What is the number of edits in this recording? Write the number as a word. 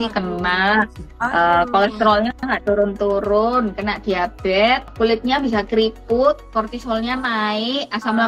two